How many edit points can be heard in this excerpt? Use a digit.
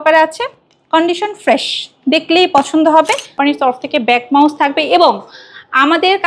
1